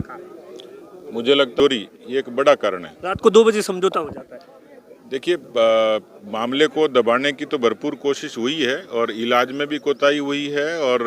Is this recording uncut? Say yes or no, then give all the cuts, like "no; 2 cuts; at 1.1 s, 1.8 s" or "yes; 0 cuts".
no; 1 cut; at 1.6 s